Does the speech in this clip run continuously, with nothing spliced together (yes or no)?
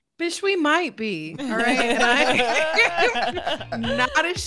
yes